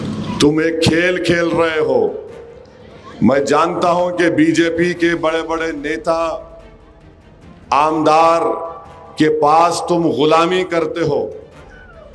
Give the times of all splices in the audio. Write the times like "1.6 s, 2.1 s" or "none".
none